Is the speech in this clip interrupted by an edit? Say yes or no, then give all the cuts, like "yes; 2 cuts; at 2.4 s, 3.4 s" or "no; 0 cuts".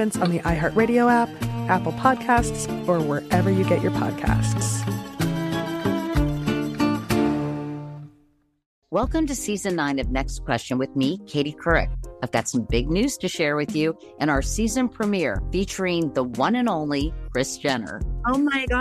yes; 1 cut; at 8.7 s